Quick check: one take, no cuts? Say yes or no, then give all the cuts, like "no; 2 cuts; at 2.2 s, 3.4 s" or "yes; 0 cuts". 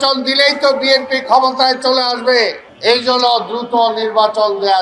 no; 1 cut; at 2.7 s